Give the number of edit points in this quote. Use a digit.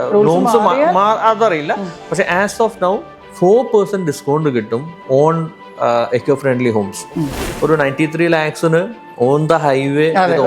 1